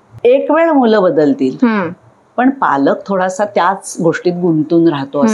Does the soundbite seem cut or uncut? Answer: uncut